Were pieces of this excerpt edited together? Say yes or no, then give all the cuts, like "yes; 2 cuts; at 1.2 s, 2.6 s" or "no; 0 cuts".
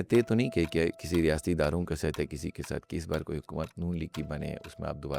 no; 0 cuts